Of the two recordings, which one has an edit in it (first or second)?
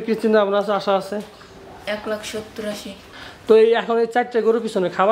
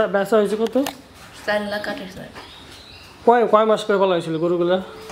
first